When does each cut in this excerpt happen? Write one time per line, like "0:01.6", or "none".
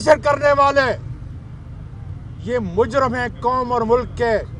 none